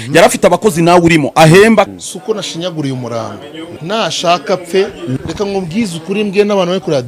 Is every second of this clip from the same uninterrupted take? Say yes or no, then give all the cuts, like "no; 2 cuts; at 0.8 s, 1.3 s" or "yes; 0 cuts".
no; 3 cuts; at 1.9 s, 3.7 s, 5.2 s